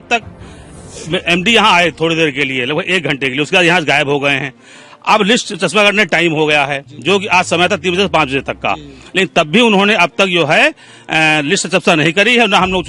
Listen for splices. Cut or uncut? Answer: uncut